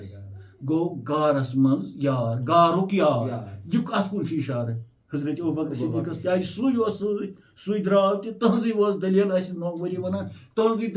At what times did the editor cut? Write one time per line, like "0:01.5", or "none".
none